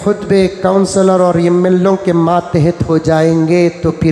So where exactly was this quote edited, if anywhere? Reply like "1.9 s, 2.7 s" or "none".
none